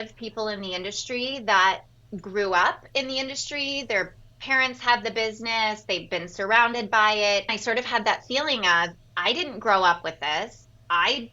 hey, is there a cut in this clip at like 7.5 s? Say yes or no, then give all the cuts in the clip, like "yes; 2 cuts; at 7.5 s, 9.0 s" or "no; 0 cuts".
yes; 1 cut; at 7.5 s